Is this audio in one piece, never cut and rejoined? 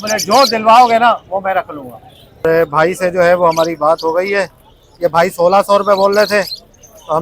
no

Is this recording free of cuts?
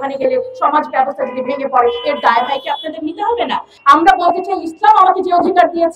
no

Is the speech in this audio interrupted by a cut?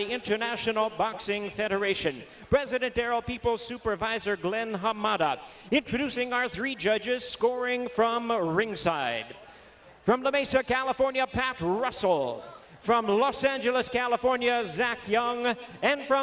no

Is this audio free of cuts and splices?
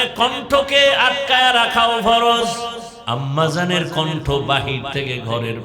no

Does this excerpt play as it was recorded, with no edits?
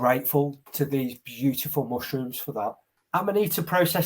no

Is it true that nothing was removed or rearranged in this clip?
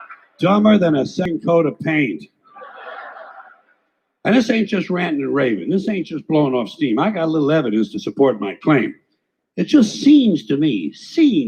no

